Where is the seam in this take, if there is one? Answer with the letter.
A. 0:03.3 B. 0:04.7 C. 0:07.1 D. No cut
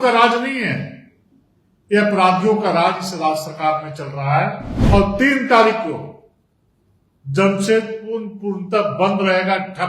B